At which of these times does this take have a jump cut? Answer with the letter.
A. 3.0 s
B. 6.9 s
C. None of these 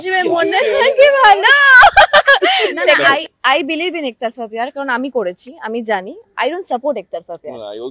A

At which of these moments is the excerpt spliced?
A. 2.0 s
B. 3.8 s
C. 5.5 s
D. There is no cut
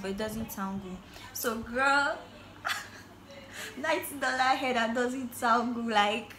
D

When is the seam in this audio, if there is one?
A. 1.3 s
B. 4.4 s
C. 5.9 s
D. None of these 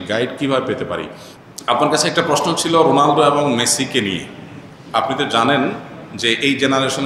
A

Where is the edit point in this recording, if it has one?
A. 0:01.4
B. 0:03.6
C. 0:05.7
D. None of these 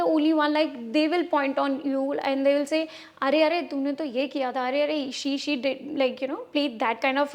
D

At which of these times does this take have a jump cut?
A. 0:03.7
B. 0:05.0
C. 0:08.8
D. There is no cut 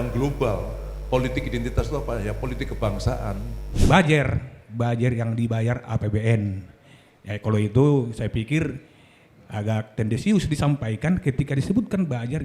A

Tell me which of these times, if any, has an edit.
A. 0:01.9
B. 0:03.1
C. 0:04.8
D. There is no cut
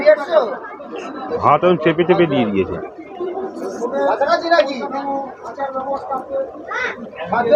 D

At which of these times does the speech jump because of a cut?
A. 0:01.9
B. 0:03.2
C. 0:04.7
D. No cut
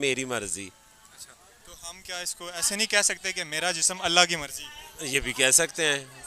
D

